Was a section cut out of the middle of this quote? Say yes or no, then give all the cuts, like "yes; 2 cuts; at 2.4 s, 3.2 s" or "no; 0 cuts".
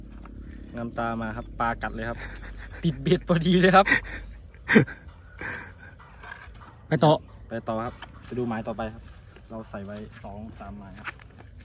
no; 0 cuts